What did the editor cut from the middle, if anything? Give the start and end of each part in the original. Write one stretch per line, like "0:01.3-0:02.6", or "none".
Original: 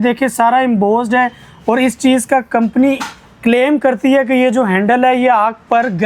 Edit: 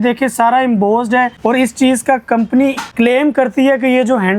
0:01.3-0:01.6
0:03.1-0:03.3